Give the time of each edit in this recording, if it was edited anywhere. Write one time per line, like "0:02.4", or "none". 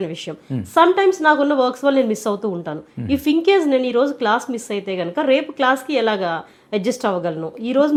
none